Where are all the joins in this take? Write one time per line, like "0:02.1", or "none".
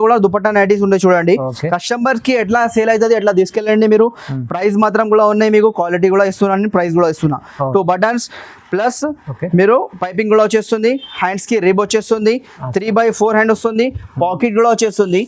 none